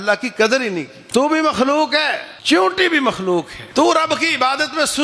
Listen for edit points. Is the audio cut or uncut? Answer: cut